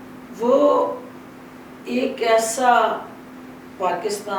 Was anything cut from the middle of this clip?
no; 0 cuts

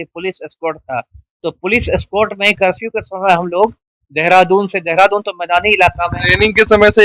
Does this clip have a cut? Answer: no; 0 cuts

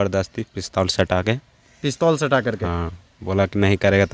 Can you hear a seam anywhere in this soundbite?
no; 0 cuts

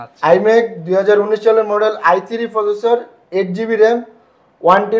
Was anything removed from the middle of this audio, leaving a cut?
no; 0 cuts

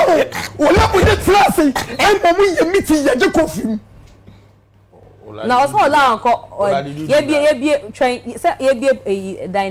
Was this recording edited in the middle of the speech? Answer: no; 0 cuts

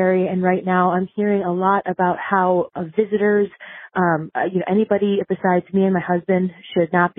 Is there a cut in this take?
no; 0 cuts

